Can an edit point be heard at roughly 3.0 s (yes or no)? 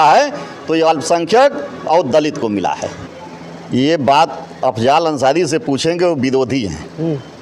yes